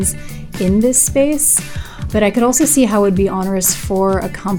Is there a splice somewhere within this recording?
yes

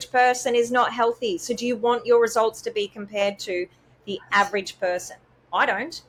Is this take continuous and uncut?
yes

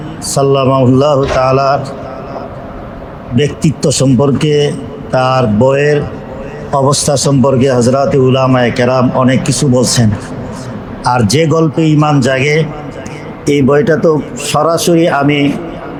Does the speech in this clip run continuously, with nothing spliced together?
yes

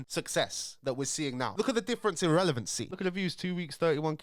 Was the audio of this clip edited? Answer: yes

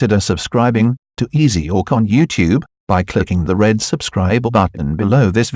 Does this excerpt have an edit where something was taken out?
yes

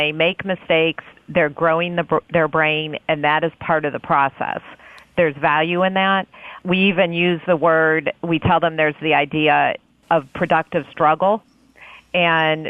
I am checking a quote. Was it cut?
no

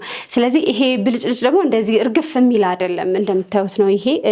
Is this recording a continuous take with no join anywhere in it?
yes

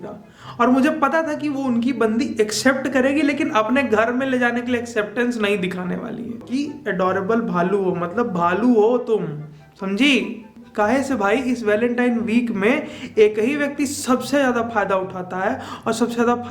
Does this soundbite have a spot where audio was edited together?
yes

